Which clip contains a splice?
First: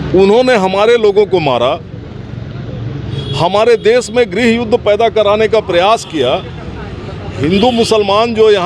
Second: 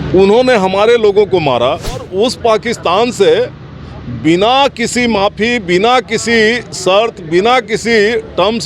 second; 1 cut; at 2.1 s

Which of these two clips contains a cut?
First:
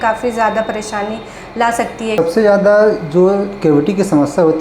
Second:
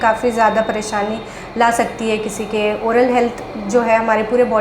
first; 1 cut; at 2.2 s

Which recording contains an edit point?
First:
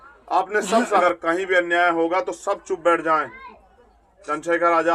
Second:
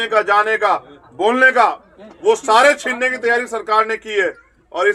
first; 1 cut; at 1.0 s

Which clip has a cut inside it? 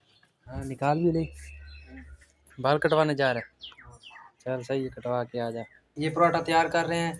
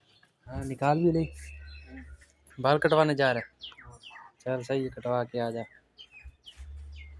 first; 1 cut; at 5.8 s

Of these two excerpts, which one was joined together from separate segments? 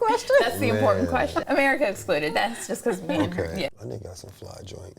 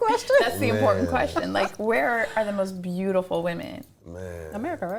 first; 2 cuts; at 1.4 s, 3.8 s

